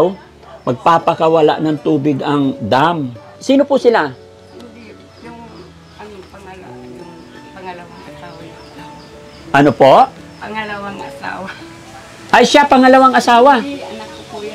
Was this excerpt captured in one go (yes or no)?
no